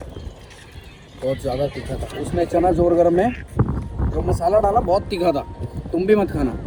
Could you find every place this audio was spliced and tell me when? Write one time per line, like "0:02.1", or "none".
none

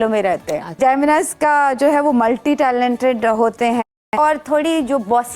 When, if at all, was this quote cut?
0:00.8
0:04.1

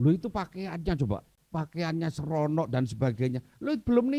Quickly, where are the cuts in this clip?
0:01.4

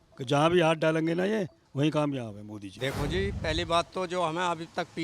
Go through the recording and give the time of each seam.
0:02.7

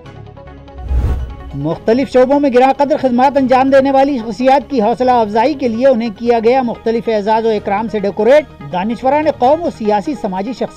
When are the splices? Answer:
none

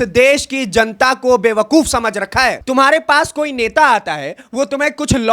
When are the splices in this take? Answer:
0:02.6

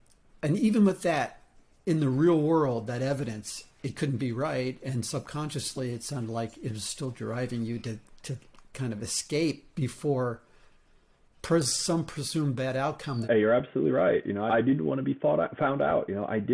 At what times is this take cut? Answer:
0:13.2
0:14.5

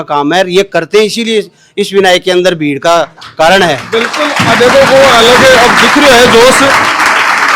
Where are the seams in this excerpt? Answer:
none

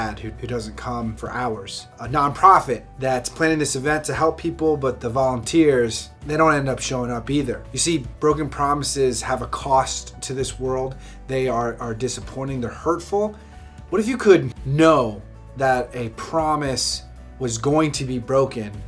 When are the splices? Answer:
0:01.6

